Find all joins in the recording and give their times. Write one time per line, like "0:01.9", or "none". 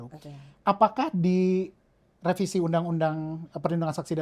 none